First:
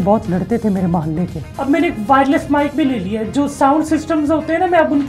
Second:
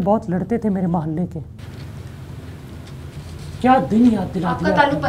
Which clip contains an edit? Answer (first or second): first